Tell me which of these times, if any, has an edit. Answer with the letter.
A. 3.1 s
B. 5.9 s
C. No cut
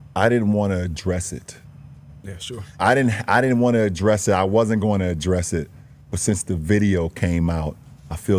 C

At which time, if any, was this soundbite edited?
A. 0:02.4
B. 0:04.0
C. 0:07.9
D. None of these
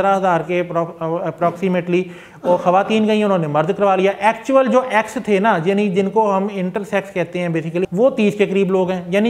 C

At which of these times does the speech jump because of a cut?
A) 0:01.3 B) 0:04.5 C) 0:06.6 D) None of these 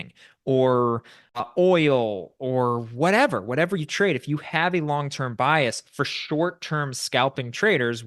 A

